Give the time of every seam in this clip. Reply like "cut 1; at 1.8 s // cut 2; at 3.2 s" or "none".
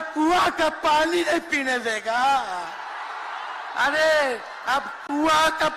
none